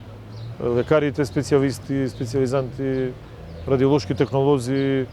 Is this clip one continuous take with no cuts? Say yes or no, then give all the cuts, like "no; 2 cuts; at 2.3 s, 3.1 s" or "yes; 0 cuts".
yes; 0 cuts